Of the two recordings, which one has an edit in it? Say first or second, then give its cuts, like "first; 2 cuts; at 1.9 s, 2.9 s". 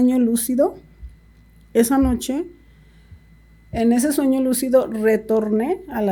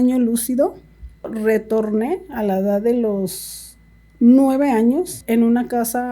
second; 2 cuts; at 1.3 s, 5.2 s